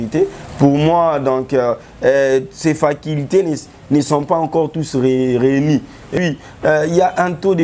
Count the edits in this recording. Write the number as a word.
one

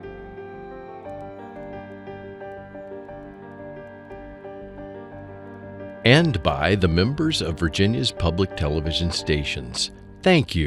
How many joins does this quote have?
one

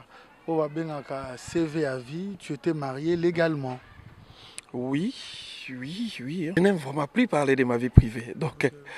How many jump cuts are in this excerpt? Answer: one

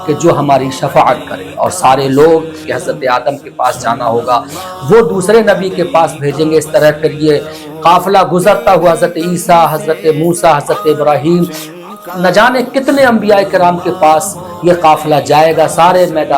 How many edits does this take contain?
one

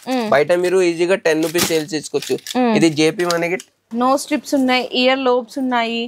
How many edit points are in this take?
one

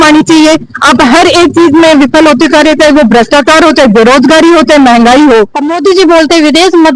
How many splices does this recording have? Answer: one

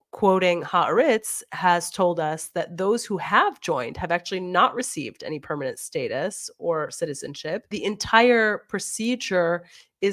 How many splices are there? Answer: one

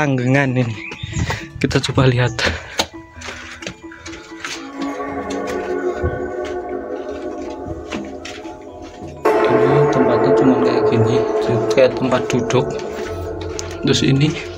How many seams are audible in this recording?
zero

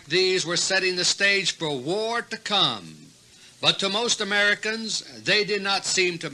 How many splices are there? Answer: one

